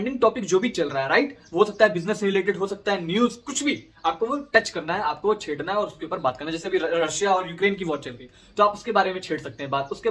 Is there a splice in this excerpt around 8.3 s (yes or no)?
no